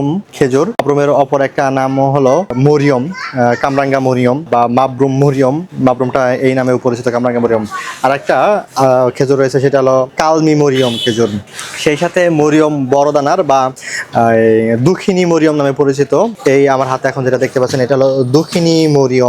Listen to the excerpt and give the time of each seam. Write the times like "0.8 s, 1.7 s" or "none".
0.8 s, 2.6 s, 4.5 s